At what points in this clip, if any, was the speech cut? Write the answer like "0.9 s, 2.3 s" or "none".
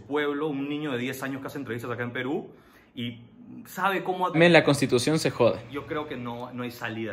4.4 s